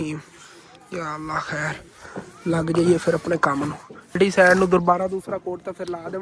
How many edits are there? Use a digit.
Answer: 1